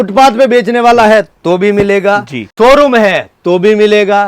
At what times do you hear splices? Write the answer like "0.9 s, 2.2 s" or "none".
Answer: 2.4 s